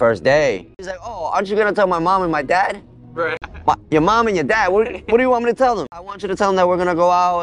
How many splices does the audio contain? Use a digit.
3